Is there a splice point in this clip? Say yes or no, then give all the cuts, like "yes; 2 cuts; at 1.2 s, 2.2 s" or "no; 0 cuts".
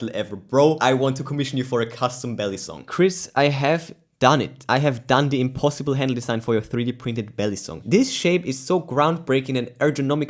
yes; 3 cuts; at 2.8 s, 4.6 s, 7.7 s